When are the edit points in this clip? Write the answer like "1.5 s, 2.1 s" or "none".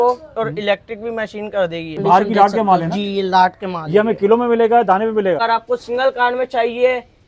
2.0 s, 5.4 s